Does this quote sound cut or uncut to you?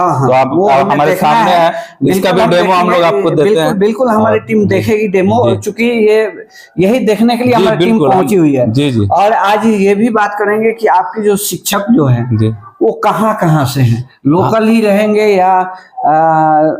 uncut